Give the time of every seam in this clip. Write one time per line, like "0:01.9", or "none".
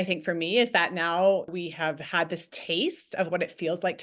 0:01.5